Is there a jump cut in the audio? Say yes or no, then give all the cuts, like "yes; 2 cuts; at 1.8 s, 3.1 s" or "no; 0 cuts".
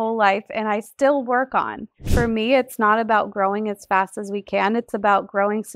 yes; 1 cut; at 2.1 s